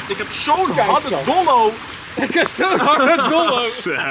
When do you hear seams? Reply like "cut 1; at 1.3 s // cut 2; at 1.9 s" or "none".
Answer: none

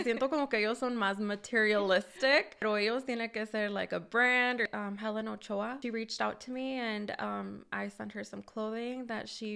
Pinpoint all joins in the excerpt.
cut 1; at 2.6 s // cut 2; at 4.7 s // cut 3; at 5.8 s

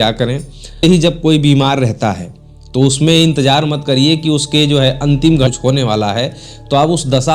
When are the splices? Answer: cut 1; at 0.8 s // cut 2; at 5.5 s

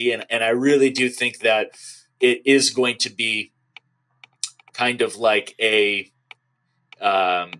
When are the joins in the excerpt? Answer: none

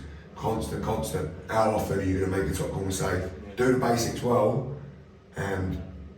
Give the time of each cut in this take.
cut 1; at 1.4 s // cut 2; at 3.4 s

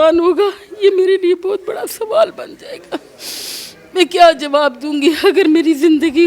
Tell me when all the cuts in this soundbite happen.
none

